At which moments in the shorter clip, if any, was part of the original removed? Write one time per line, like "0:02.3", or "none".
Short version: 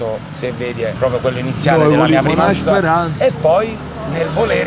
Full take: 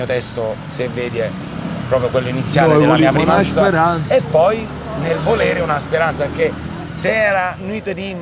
0:01.0